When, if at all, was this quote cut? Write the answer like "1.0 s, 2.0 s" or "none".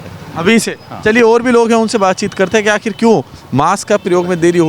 none

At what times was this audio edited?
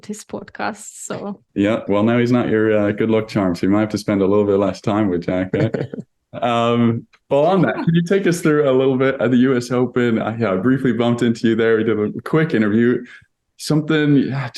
none

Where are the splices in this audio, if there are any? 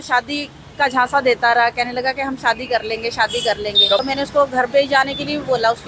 4.0 s

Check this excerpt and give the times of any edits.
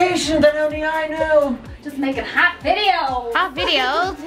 1.7 s

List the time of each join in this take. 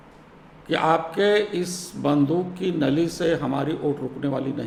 none

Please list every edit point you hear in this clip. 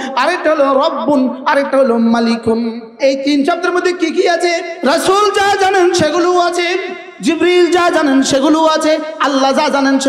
3.0 s, 4.7 s

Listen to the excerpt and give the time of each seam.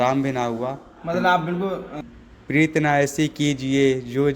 2.0 s

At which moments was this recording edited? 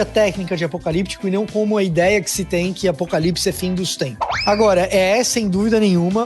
4.3 s

